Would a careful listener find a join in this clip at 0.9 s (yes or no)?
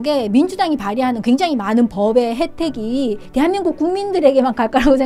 no